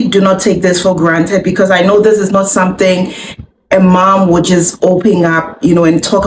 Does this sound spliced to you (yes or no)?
no